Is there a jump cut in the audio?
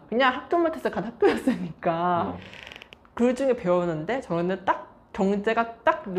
yes; 1 cut; at 2.3 s

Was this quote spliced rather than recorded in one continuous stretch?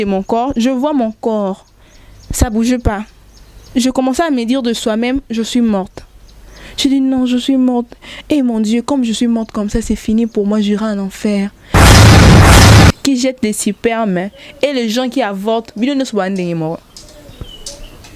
yes; 3 cuts; at 11.6 s, 13.0 s, 16.9 s

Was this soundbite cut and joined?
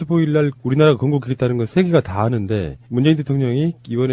no; 0 cuts

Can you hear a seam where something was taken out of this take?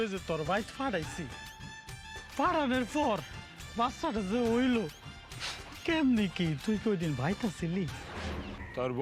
no; 0 cuts

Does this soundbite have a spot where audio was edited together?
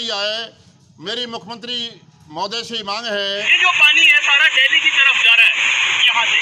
yes; 1 cut; at 3.5 s

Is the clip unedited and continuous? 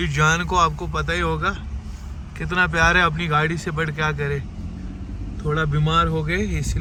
yes; 0 cuts

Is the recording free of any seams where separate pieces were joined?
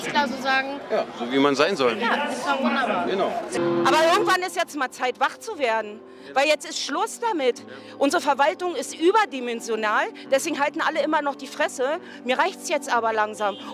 no; 1 cut; at 3.6 s

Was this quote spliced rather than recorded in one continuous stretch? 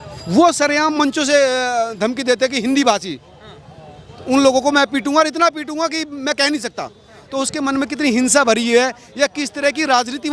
no; 0 cuts

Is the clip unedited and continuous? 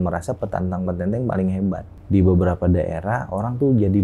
no; 1 cut; at 1.9 s

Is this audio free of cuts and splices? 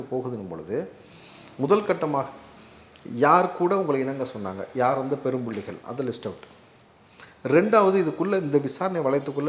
yes; 0 cuts

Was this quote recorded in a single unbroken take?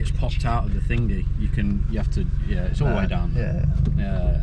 yes; 0 cuts

